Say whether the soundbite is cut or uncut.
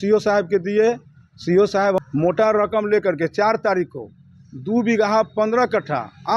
cut